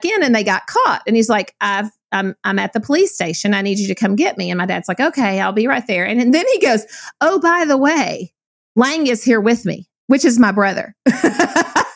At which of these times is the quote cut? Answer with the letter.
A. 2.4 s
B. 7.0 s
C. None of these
C